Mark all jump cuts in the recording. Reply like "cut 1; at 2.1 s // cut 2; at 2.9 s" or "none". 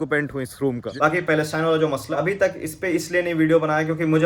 cut 1; at 0.9 s // cut 2; at 2.1 s